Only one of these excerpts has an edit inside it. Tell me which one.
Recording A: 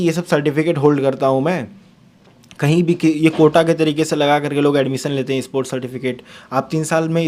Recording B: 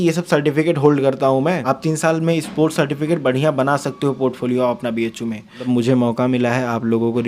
B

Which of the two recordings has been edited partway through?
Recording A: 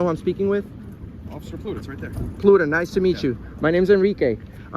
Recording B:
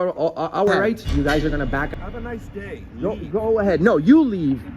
B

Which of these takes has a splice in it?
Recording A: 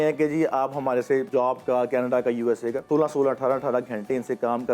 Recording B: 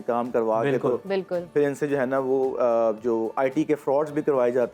A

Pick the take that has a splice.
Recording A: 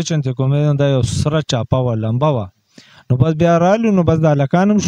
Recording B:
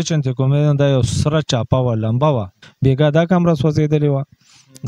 B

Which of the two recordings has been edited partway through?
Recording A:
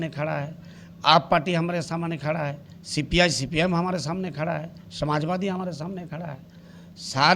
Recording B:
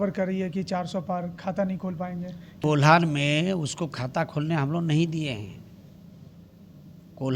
B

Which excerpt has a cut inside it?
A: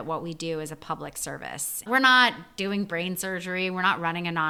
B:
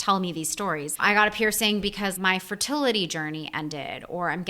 B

